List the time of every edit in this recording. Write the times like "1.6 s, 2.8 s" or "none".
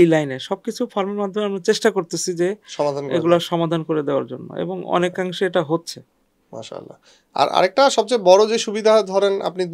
none

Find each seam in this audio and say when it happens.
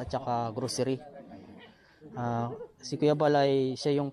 none

